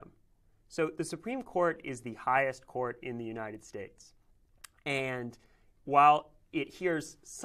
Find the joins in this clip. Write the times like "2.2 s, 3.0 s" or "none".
none